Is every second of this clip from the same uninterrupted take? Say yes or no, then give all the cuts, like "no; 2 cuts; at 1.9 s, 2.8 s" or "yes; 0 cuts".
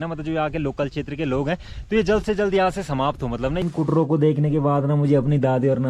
no; 1 cut; at 3.6 s